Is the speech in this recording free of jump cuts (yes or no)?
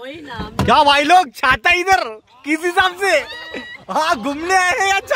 yes